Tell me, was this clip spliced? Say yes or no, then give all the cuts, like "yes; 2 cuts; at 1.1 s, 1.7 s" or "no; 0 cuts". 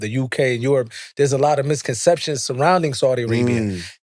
no; 0 cuts